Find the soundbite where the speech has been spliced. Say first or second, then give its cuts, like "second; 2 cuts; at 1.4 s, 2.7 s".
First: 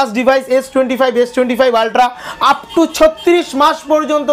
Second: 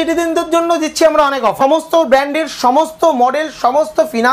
second; 1 cut; at 1.6 s